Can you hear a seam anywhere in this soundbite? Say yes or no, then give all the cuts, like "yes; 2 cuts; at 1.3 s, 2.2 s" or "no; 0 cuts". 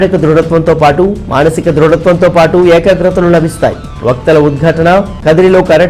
no; 0 cuts